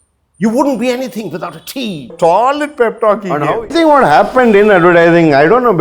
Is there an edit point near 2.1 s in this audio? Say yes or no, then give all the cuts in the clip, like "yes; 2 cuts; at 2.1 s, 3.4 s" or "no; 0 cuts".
yes; 2 cuts; at 2.1 s, 3.7 s